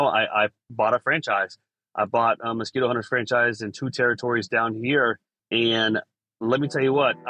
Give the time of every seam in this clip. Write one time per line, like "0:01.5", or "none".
0:05.3